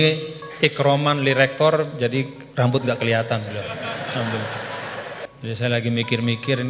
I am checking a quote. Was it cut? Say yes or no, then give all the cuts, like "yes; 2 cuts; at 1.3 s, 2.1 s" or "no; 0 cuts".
yes; 1 cut; at 5.3 s